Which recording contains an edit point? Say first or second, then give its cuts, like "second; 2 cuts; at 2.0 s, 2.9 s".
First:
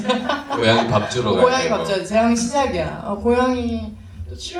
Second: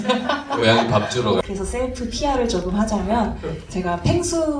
second; 1 cut; at 1.4 s